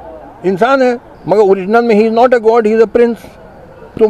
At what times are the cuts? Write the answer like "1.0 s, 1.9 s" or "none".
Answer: 1.1 s